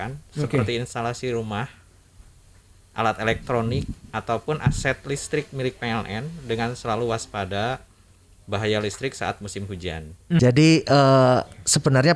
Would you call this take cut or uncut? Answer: cut